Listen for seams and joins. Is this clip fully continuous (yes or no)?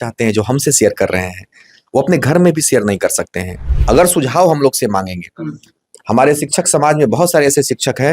no